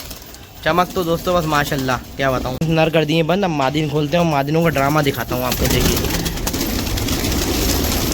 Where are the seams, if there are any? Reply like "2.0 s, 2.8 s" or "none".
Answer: 2.5 s, 6.5 s